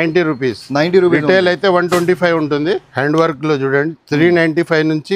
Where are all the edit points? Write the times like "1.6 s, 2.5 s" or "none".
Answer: 2.9 s